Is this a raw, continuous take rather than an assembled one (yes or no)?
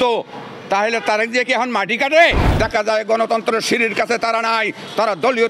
no